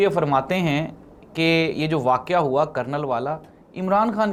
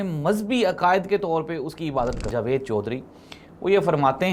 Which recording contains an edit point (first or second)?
second